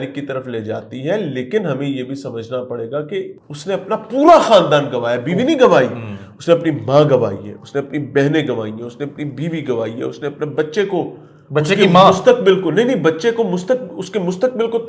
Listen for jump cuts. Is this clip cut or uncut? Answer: cut